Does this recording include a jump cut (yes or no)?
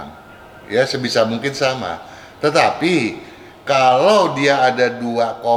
no